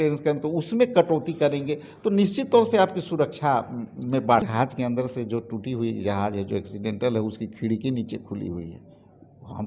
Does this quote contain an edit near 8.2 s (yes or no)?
no